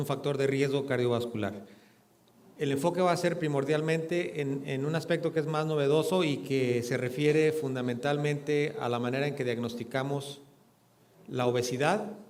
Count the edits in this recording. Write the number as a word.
zero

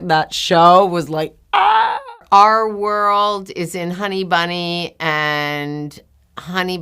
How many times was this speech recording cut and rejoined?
one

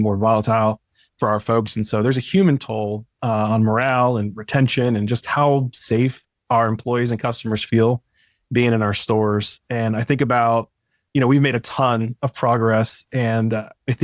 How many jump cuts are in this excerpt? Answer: one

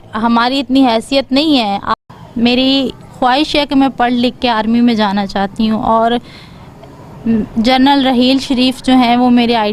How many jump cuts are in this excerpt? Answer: one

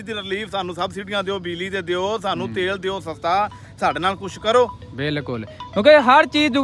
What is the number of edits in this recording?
zero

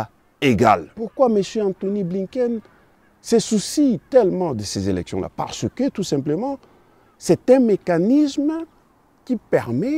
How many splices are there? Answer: one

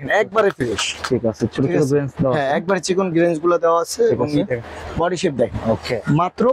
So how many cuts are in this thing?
zero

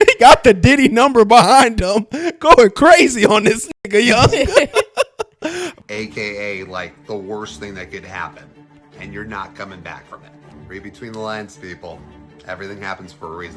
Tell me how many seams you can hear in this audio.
one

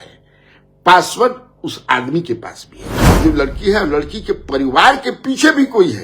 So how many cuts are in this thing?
one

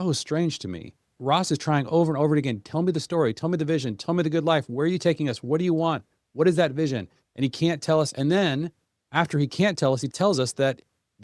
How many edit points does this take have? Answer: two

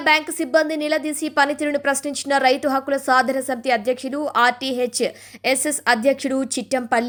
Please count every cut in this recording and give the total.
zero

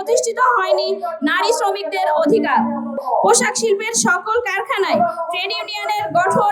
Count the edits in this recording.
one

